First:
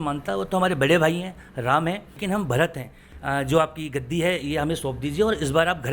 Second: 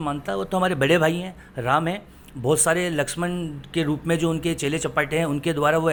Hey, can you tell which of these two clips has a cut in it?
first; 2 cuts; at 2.2 s, 3.1 s

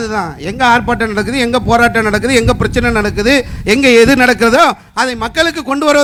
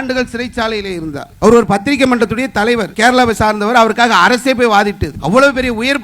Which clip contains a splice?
second; 3 cuts; at 1.3 s, 2.9 s, 5.1 s

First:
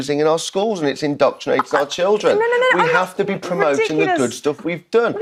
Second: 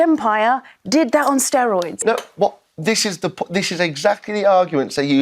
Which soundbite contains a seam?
second; 1 cut; at 2.0 s

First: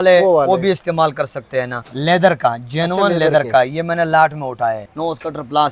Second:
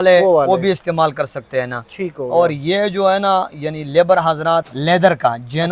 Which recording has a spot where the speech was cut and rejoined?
first; 2 cuts; at 1.9 s, 4.9 s

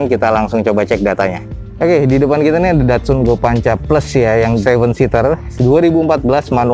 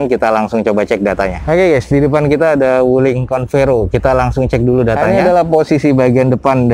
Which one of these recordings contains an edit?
second; 2 cuts; at 1.4 s, 5.0 s

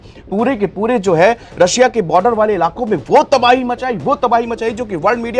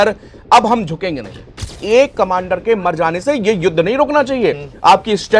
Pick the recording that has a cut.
second; 1 cut; at 1.7 s

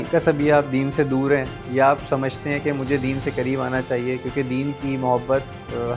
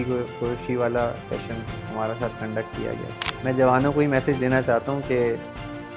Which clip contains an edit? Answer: second; 1 cut; at 3.3 s

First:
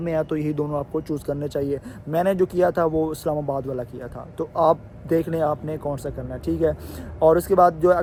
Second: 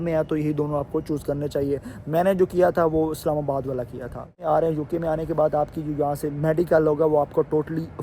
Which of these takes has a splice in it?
second; 1 cut; at 4.4 s

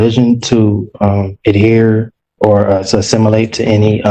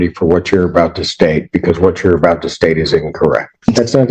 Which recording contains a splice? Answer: second; 1 cut; at 3.2 s

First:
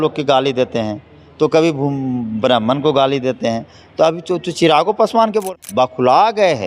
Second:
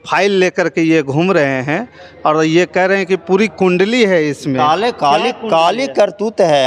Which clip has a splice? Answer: first; 1 cut; at 5.4 s

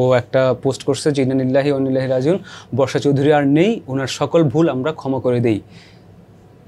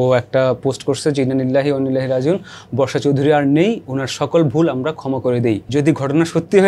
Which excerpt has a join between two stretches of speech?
second; 1 cut; at 5.6 s

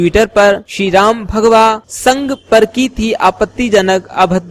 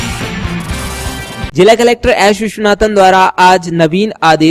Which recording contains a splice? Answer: second; 1 cut; at 1.3 s

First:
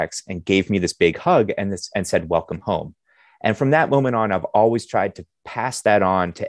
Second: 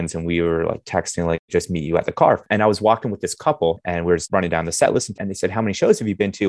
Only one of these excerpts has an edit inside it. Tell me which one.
second; 4 cuts; at 1.4 s, 2.4 s, 4.2 s, 5.2 s

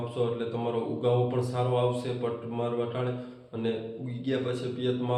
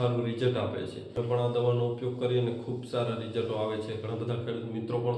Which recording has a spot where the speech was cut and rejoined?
second; 1 cut; at 1.1 s

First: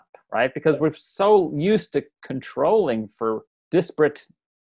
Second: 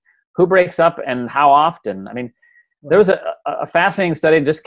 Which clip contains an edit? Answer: first; 1 cut; at 3.5 s

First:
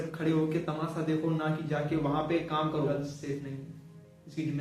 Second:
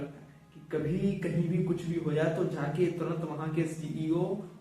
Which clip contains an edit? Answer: first; 1 cut; at 2.9 s

